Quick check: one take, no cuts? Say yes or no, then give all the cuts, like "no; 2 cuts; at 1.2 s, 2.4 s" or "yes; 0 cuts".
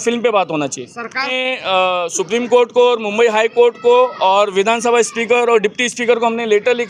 no; 1 cut; at 1.3 s